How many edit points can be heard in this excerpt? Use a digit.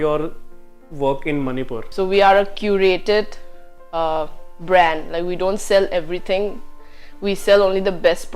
1